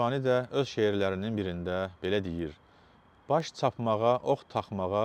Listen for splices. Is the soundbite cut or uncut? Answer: uncut